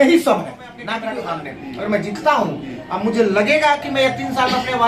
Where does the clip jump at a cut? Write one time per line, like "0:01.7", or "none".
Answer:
0:00.9